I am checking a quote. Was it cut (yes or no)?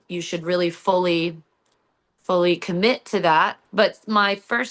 yes